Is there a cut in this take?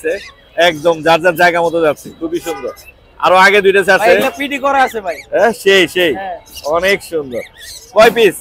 no; 0 cuts

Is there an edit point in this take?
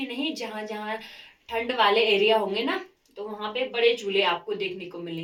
no; 0 cuts

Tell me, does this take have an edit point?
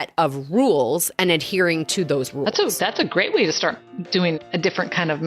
yes; 1 cut; at 4.2 s

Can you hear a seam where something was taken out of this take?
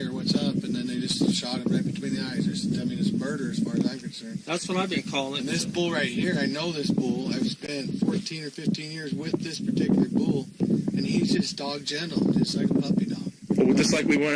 yes; 1 cut; at 9.0 s

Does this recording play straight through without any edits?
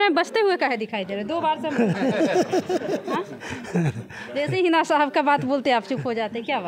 yes; 0 cuts

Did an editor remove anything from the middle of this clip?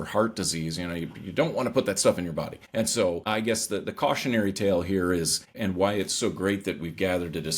yes; 3 cuts; at 2.6 s, 3.2 s, 5.5 s

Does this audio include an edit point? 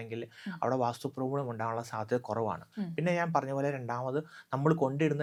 no; 0 cuts

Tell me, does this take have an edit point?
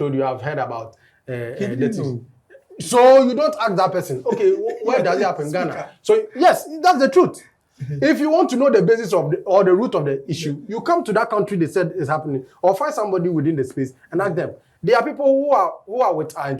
no; 0 cuts

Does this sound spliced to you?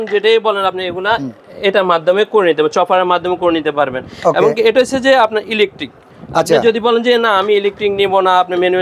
no; 0 cuts

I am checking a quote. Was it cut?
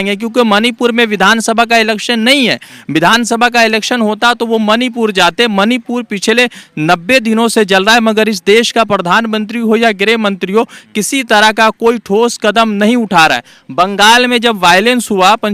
no; 0 cuts

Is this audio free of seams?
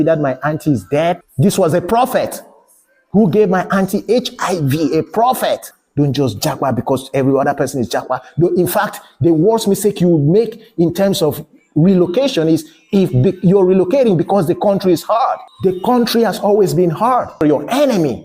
no; 4 cuts; at 1.3 s, 5.8 s, 15.5 s, 17.3 s

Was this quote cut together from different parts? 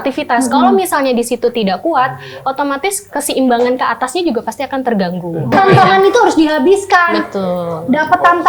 yes; 1 cut; at 5.5 s

